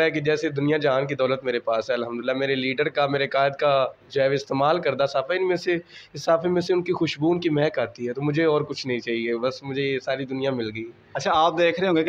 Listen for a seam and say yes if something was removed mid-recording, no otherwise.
no